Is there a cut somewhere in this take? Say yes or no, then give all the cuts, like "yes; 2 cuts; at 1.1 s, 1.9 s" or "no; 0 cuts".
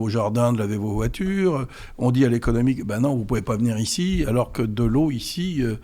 no; 0 cuts